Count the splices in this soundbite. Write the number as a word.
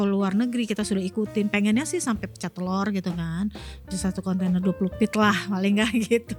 zero